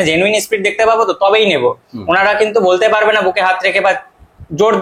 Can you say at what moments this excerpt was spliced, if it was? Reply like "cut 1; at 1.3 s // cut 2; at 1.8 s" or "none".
none

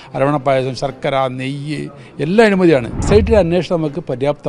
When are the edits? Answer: cut 1; at 3.0 s

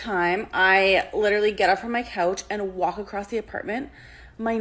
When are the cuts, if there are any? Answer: none

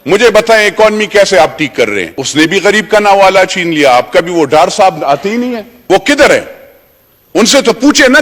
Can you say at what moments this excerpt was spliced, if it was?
cut 1; at 2.1 s // cut 2; at 5.7 s

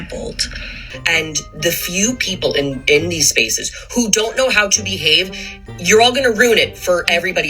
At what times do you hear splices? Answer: cut 1; at 0.9 s

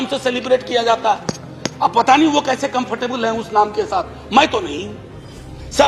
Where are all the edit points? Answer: none

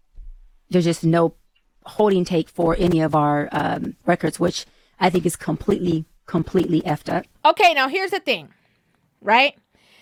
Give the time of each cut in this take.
none

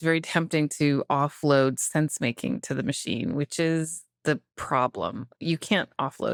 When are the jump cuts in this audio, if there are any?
none

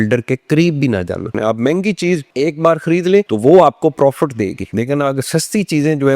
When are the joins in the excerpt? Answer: cut 1; at 1.3 s

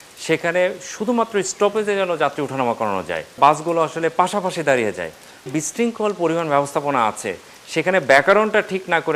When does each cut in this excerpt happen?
cut 1; at 3.4 s // cut 2; at 5.5 s

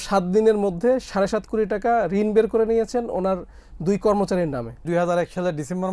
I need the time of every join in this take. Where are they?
cut 1; at 4.8 s

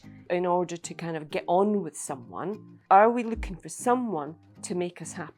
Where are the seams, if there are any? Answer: cut 1; at 2.7 s

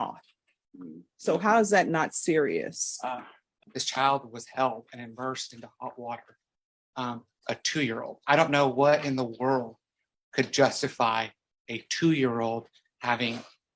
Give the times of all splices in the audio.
cut 1; at 3.5 s

